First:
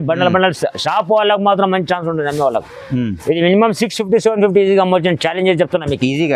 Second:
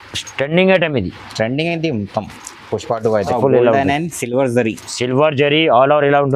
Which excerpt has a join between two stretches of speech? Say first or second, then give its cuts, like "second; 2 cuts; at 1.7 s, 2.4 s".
second; 1 cut; at 3.3 s